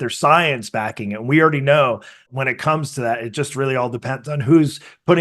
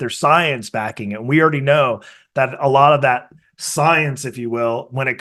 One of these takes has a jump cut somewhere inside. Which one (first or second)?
first